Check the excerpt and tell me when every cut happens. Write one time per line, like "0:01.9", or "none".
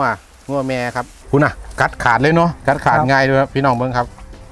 0:01.1